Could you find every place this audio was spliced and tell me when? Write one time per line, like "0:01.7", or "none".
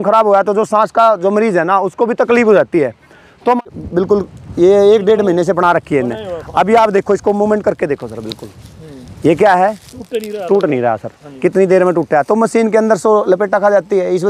0:03.6